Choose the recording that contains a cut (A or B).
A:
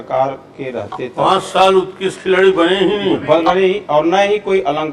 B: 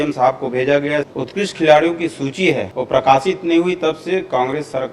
B